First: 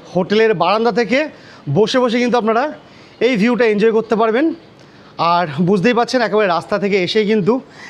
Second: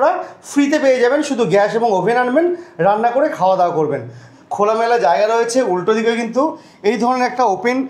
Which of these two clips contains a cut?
second; 1 cut; at 4.3 s

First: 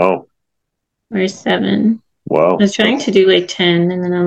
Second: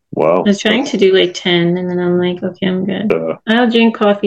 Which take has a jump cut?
second; 1 cut; at 3.0 s

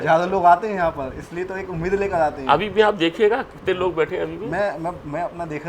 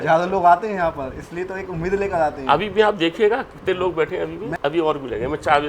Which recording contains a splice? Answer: second; 1 cut; at 4.5 s

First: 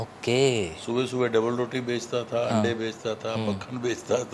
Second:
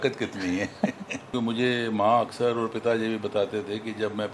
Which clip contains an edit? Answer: second; 1 cut; at 1.3 s

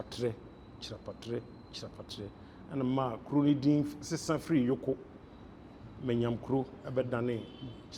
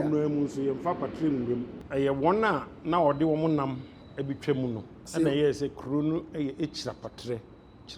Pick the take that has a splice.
second; 2 cuts; at 1.8 s, 5.0 s

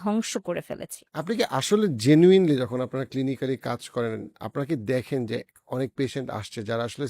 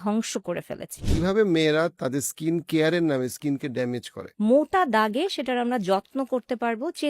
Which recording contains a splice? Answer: second; 2 cuts; at 1.0 s, 4.2 s

